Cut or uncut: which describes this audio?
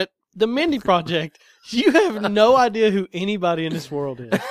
uncut